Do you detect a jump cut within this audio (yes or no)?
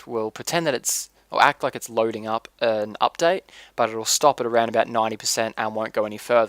yes